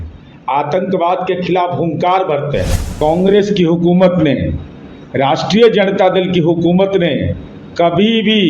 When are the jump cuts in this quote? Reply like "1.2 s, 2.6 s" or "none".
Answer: 2.9 s